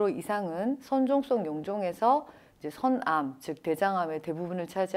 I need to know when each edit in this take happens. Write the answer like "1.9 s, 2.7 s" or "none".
none